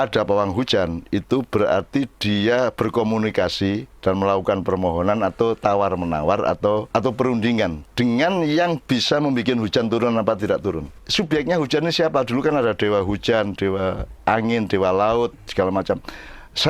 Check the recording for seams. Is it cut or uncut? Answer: cut